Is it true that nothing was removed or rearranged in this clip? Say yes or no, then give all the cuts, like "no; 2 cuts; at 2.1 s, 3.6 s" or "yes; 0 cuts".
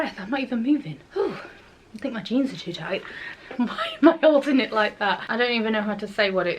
no; 2 cuts; at 3.3 s, 5.2 s